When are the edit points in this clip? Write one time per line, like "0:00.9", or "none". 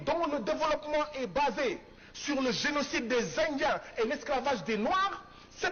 none